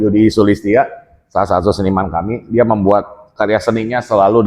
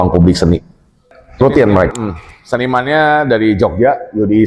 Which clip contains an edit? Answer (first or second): second